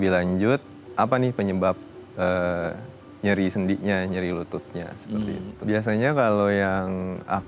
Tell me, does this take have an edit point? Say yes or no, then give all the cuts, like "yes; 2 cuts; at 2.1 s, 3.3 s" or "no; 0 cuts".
yes; 1 cut; at 5.5 s